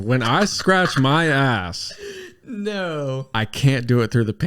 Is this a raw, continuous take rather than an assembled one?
no; 1 cut; at 3.3 s

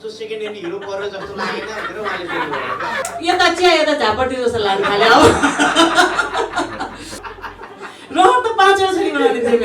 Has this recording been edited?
yes; 2 cuts; at 3.0 s, 7.2 s

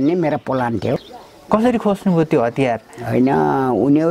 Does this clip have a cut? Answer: yes; 1 cut; at 1.1 s

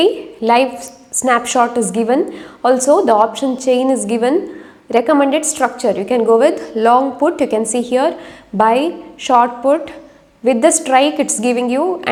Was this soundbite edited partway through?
no; 0 cuts

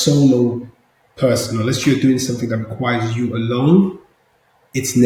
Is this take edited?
no; 0 cuts

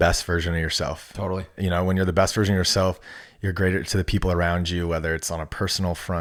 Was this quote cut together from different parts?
no; 0 cuts

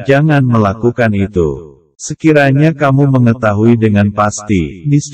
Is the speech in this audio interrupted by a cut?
no; 0 cuts

